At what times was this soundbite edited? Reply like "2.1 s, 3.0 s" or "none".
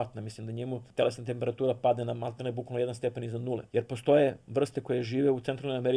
0.8 s, 3.6 s